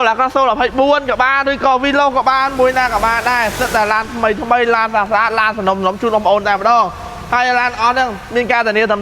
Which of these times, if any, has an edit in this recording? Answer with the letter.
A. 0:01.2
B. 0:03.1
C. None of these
C